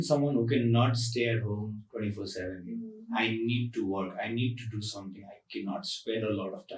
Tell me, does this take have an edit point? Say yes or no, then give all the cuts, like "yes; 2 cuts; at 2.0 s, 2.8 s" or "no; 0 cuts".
no; 0 cuts